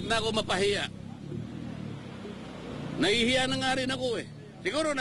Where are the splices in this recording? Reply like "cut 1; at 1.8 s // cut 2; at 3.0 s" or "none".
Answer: none